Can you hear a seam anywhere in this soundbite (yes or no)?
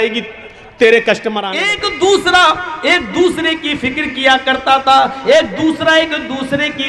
yes